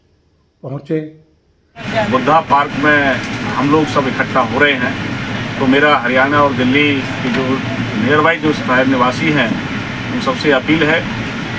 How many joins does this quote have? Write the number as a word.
one